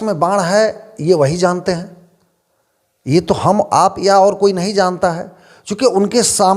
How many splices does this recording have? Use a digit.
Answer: 0